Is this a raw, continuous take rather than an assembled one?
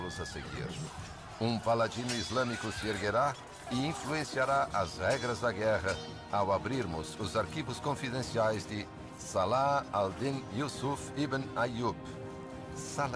no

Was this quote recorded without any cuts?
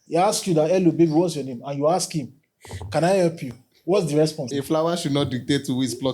no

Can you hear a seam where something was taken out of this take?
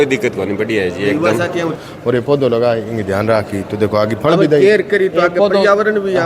yes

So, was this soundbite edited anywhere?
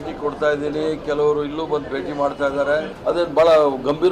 yes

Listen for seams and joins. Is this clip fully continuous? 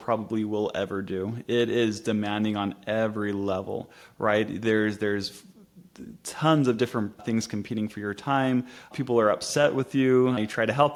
yes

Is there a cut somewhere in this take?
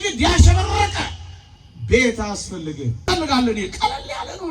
yes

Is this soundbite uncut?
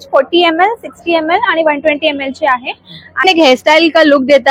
no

